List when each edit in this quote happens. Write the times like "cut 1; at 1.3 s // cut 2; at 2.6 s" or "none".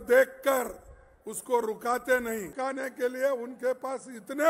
cut 1; at 2.5 s